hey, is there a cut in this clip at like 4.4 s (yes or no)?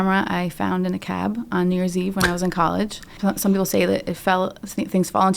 no